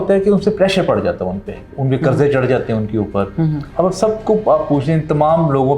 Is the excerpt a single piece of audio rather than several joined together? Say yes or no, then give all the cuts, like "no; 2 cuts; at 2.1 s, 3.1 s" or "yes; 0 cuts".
yes; 0 cuts